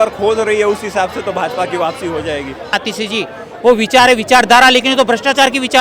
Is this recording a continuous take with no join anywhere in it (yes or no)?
no